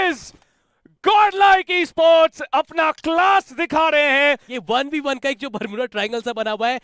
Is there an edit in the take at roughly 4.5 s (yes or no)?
yes